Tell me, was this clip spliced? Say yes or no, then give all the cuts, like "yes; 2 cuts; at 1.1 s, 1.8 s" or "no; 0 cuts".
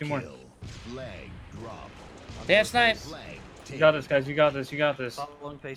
no; 0 cuts